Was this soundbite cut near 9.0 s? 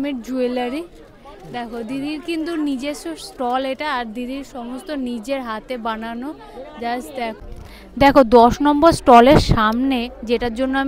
no; 1 cut; at 7.4 s

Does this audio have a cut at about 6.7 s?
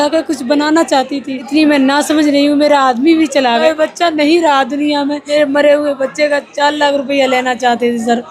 no; 3 cuts; at 1.4 s, 3.6 s, 5.2 s

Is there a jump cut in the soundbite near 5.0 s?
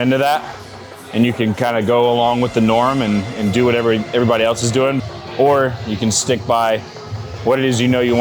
yes; 1 cut; at 5.0 s

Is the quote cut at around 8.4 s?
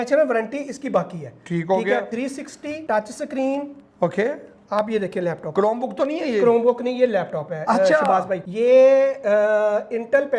yes; 2 cuts; at 2.2 s, 8.4 s

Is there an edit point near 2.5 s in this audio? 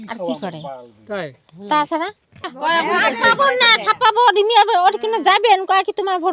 yes; 1 cut; at 2.5 s

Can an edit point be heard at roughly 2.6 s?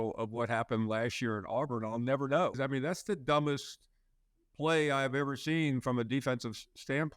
yes; 1 cut; at 2.6 s

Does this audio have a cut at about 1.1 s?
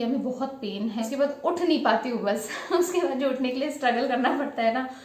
yes; 1 cut; at 1.1 s

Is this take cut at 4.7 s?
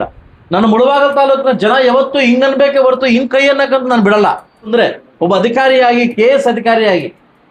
yes; 1 cut; at 4.7 s

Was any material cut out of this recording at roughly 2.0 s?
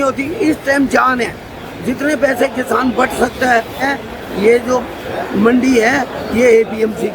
no; 1 cut; at 3.8 s

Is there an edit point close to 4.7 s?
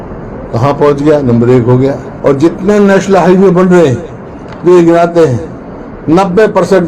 no; 1 cut; at 2.1 s

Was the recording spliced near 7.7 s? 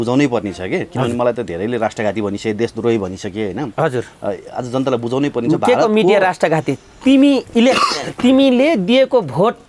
no; 0 cuts

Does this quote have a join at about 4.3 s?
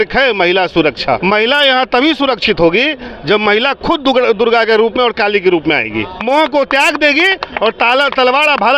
no; 2 cuts; at 1.2 s, 6.2 s

